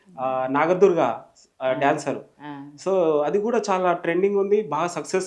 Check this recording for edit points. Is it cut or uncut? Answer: uncut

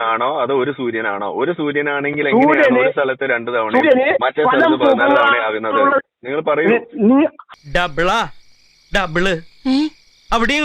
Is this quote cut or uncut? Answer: cut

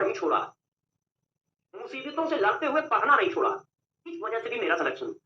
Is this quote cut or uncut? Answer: uncut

